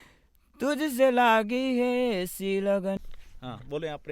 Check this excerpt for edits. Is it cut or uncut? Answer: cut